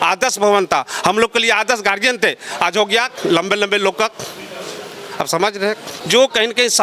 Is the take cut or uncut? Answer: cut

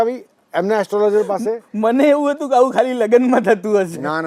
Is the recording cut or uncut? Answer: uncut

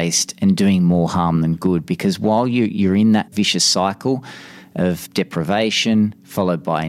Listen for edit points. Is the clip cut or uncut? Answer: cut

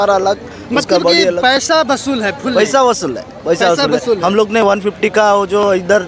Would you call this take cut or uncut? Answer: uncut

